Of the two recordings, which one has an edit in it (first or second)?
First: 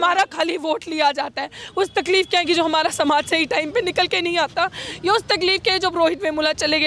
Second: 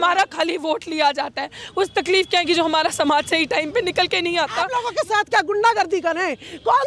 second